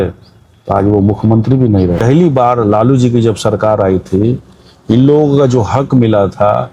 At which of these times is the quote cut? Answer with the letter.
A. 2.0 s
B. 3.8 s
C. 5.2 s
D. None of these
A